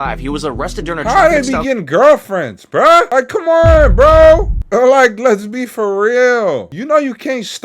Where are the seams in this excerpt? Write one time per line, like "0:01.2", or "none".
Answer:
0:03.1
0:04.6
0:06.7

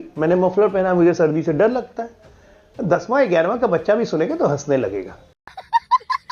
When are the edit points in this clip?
none

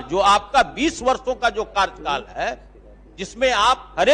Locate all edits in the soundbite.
none

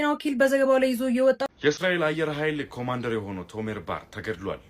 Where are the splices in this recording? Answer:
0:01.4

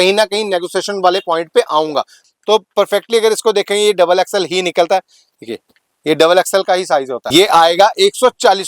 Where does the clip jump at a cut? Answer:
0:02.2
0:07.2

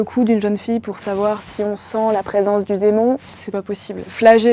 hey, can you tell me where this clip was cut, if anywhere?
none

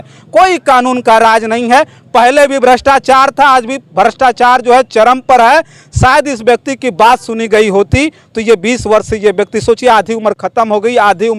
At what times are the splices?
none

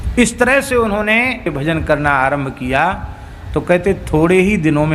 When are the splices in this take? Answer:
0:01.5

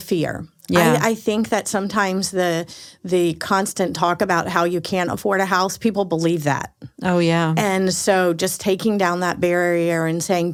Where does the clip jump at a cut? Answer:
none

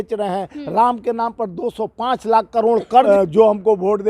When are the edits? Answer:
0:03.1

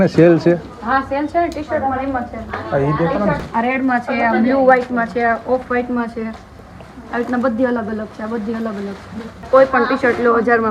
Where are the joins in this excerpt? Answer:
0:03.4
0:09.5

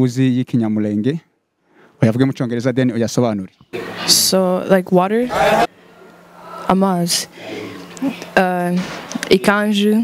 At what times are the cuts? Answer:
0:03.9

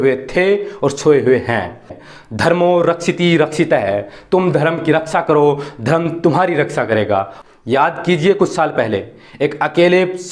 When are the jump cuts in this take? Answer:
0:02.0
0:07.3

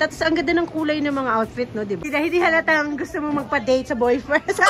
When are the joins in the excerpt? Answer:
0:02.0

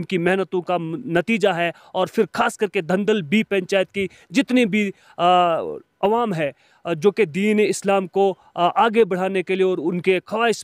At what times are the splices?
none

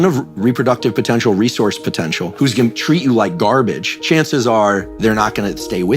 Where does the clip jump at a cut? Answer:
0:02.3
0:03.9

